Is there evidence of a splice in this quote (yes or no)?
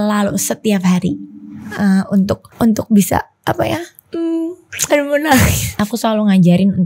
yes